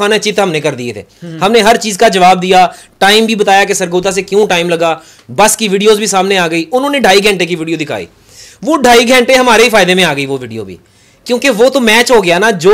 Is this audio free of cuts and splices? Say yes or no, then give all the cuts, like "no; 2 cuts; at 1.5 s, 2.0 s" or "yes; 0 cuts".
yes; 0 cuts